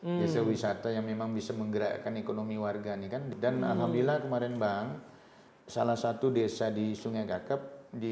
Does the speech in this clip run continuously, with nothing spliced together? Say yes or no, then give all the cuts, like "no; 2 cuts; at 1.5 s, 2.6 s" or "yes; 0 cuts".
no; 1 cut; at 3.3 s